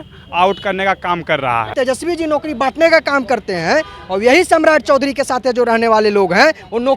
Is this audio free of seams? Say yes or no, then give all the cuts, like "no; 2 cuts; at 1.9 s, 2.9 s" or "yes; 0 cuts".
no; 1 cut; at 1.7 s